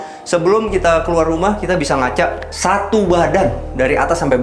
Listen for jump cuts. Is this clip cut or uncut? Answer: cut